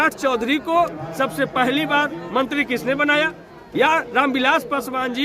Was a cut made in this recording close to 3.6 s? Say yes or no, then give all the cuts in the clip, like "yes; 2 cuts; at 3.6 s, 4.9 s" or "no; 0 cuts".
yes; 1 cut; at 3.6 s